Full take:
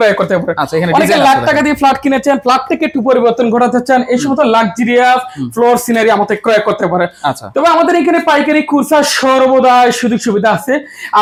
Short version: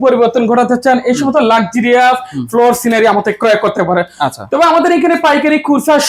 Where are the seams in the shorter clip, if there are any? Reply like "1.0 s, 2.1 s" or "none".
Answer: none